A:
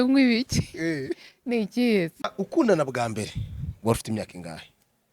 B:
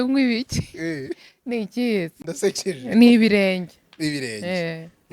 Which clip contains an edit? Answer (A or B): A